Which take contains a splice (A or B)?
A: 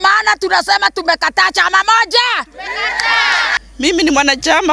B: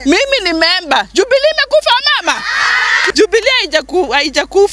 A